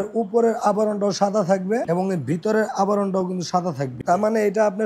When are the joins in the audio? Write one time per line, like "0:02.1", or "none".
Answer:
0:01.8
0:04.0